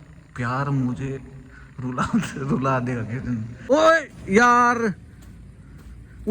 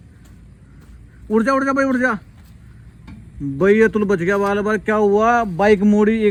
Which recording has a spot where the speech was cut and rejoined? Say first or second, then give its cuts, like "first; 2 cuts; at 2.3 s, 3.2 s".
first; 1 cut; at 3.6 s